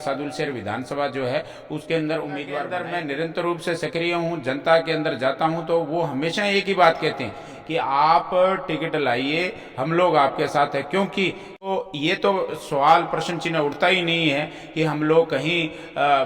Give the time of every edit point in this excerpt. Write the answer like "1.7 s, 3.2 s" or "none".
2.7 s, 11.7 s